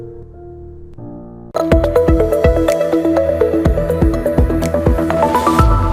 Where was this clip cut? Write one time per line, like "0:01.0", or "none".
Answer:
0:01.5